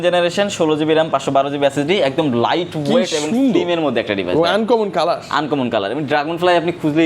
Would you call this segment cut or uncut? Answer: uncut